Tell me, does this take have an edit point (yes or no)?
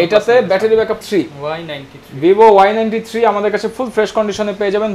yes